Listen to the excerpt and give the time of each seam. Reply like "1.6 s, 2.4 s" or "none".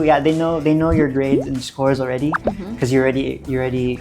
none